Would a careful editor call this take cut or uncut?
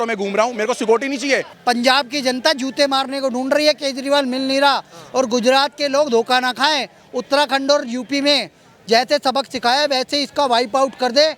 cut